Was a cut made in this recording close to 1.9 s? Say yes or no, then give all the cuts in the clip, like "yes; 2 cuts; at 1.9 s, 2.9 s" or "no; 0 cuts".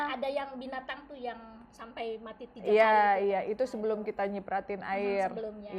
no; 0 cuts